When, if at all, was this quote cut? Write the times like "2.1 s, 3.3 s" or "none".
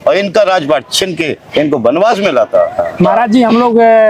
2.8 s

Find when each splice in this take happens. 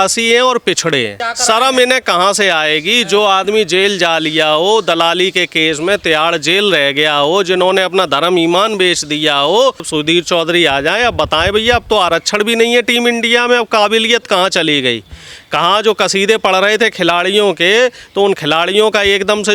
1.3 s, 9.9 s

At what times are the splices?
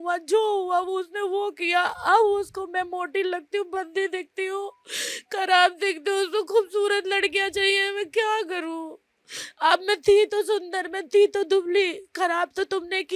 none

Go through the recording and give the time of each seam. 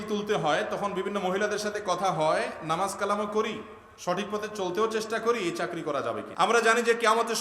6.3 s

